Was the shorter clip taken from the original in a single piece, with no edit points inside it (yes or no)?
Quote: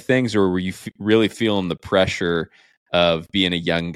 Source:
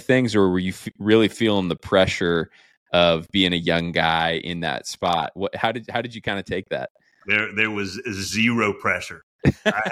yes